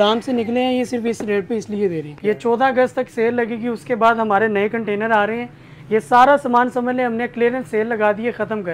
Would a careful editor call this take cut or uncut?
cut